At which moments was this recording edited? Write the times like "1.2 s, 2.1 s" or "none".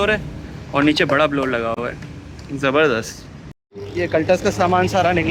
none